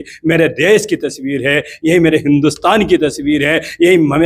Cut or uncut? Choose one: uncut